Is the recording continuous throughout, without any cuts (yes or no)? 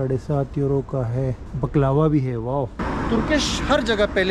no